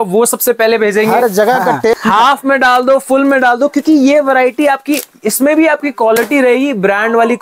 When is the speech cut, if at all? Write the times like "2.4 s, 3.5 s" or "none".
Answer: 1.9 s